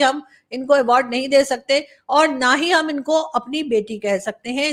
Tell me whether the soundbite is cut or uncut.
uncut